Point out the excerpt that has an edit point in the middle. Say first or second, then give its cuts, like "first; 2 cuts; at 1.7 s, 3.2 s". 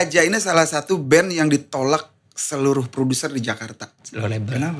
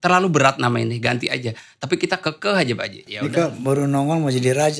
second; 1 cut; at 3.0 s